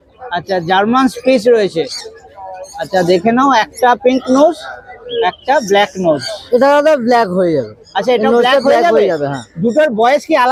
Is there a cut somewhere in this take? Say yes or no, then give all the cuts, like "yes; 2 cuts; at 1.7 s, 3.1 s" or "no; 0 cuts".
no; 0 cuts